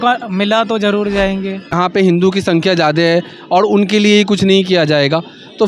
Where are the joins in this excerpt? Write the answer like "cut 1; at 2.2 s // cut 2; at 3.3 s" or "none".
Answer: cut 1; at 1.7 s